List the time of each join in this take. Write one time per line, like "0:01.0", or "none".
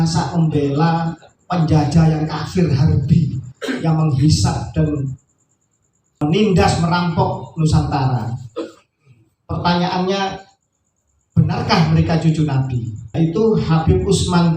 0:06.2
0:13.1